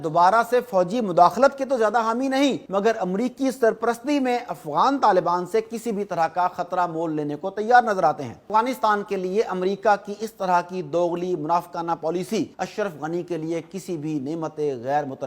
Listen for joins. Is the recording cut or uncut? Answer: cut